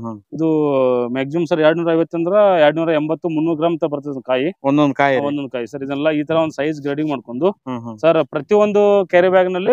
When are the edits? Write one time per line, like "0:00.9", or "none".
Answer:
none